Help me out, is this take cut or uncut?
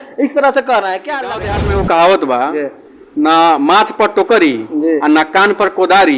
cut